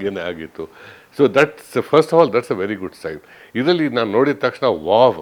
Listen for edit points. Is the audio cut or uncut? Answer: uncut